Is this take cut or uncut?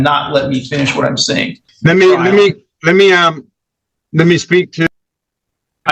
cut